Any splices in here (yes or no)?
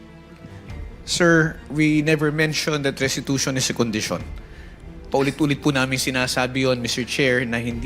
yes